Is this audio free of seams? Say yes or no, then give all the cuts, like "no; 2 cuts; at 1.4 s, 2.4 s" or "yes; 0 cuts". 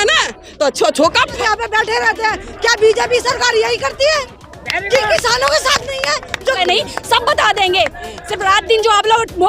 no; 2 cuts; at 1.4 s, 6.6 s